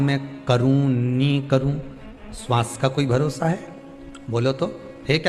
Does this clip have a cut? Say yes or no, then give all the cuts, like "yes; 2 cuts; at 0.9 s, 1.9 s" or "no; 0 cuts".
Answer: no; 0 cuts